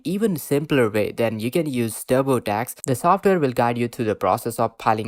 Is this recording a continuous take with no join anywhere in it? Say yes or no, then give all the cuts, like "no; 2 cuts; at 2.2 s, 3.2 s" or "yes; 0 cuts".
no; 1 cut; at 2.8 s